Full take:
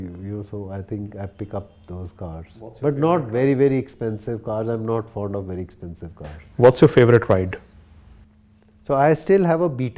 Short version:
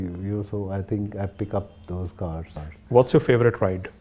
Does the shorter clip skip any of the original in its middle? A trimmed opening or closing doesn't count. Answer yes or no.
yes